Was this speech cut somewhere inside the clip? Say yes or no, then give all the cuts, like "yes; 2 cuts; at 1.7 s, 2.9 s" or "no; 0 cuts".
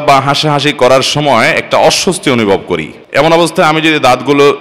yes; 1 cut; at 3.0 s